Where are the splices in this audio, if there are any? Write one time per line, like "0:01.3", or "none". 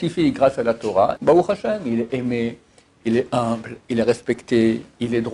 0:01.2

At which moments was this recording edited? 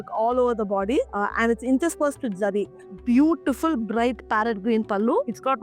0:02.8

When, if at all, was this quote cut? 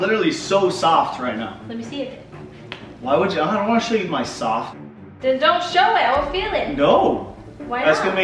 none

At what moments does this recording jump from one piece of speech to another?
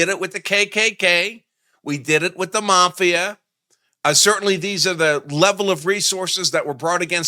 none

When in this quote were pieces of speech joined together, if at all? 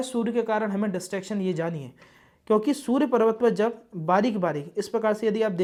none

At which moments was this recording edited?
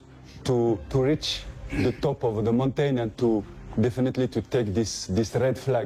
none

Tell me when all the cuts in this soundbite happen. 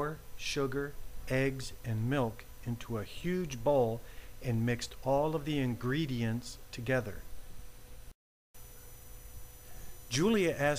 0:08.1

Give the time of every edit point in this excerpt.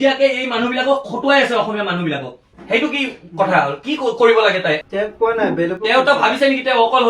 0:02.4

